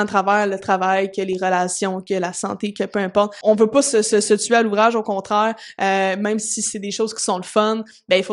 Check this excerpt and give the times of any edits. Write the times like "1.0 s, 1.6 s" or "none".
3.4 s